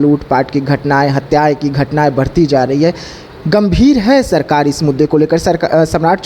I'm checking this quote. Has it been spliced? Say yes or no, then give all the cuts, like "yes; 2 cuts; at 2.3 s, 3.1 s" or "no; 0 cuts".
no; 0 cuts